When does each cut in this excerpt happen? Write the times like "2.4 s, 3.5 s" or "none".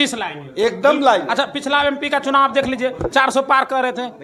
none